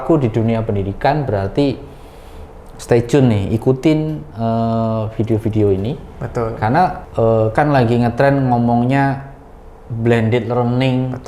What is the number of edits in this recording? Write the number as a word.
one